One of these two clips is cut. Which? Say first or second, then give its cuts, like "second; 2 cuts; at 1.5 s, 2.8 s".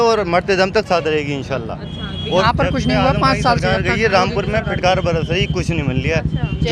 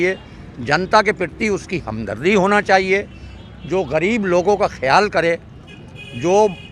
first; 1 cut; at 2.4 s